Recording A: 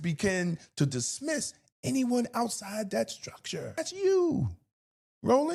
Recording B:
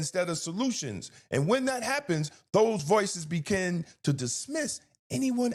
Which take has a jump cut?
A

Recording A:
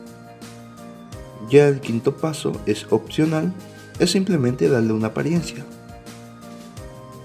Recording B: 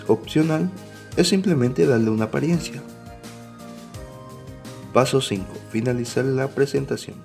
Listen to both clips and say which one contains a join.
A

